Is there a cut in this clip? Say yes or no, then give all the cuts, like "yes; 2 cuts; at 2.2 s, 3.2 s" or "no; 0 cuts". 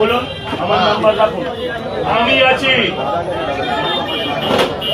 yes; 1 cut; at 2.1 s